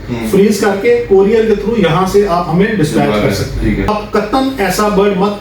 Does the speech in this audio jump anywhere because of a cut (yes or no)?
yes